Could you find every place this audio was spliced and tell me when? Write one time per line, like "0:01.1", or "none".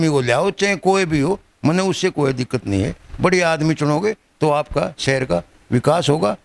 none